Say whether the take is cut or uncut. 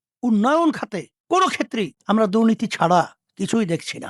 cut